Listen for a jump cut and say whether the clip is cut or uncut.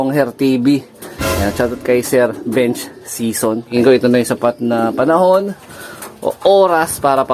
cut